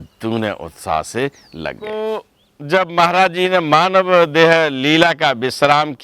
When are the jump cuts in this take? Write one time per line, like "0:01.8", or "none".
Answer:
0:01.8